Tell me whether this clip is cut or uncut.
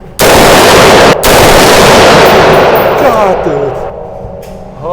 cut